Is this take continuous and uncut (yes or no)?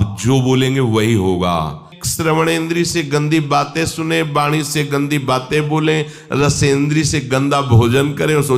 no